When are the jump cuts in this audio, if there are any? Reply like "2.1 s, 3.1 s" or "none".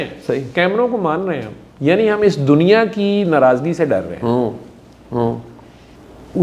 none